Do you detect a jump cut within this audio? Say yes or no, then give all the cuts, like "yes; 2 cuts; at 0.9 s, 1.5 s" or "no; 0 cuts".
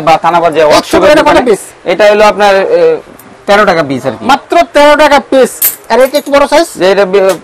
no; 0 cuts